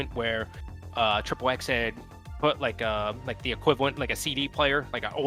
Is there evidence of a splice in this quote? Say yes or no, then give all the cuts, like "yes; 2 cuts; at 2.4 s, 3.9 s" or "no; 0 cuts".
no; 0 cuts